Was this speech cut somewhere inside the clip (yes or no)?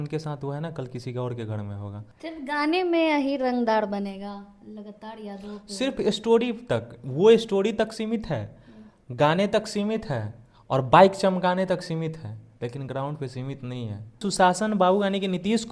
yes